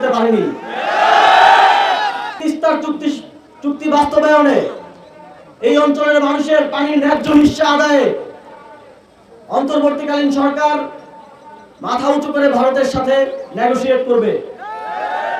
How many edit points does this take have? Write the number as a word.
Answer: one